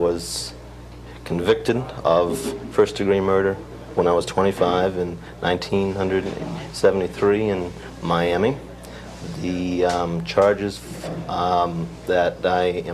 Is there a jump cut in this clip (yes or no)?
no